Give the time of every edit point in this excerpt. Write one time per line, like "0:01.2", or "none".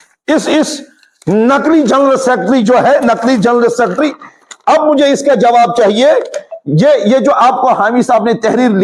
none